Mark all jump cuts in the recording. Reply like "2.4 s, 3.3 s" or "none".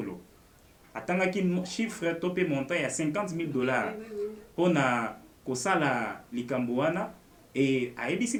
none

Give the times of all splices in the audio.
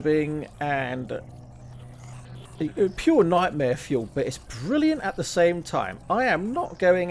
none

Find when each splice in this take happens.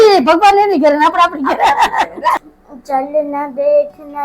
2.4 s

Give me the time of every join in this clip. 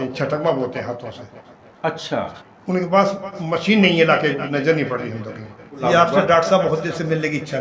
5.7 s

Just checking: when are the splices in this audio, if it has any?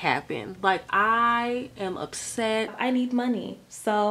2.7 s

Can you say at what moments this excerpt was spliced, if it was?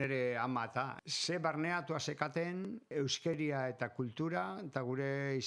1.0 s, 2.9 s

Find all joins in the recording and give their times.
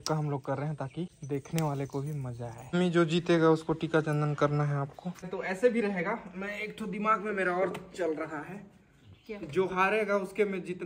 1.2 s, 2.6 s, 5.3 s

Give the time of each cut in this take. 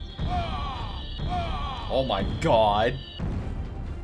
none

